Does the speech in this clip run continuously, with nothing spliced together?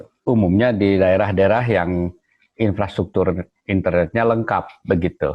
yes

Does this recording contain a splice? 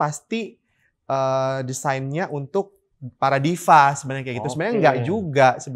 no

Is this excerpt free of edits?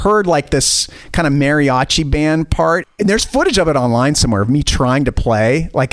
no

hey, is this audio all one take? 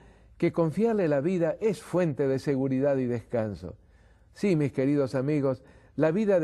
no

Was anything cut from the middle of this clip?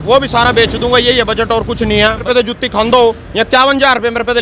yes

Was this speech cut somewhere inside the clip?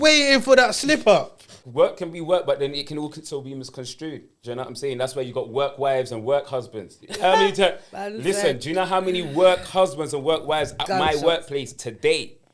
yes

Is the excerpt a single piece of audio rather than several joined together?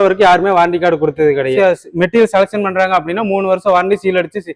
no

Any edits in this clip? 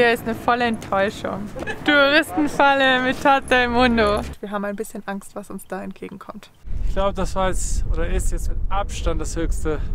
yes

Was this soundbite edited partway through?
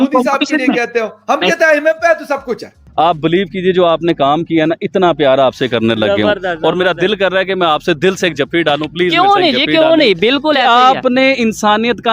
yes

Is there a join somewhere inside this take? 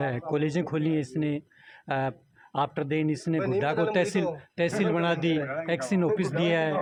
no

